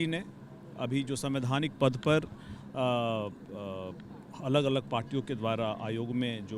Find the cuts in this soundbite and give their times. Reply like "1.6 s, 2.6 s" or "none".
none